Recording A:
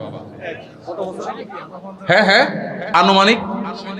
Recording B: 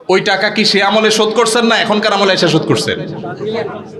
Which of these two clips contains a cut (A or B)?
A